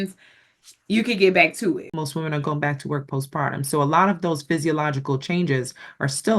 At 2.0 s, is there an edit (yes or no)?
yes